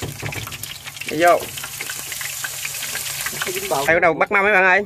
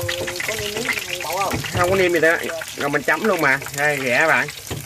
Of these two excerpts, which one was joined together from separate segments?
first; 1 cut; at 3.9 s

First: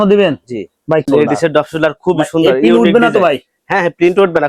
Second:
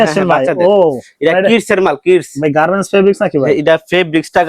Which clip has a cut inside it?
first; 1 cut; at 1.0 s

